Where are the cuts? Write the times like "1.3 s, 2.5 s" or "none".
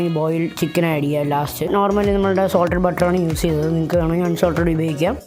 1.7 s